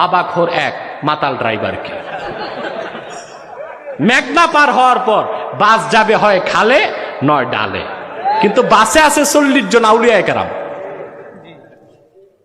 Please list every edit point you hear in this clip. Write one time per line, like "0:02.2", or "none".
none